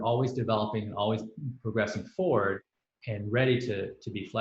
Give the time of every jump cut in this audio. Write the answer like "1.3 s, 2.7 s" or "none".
none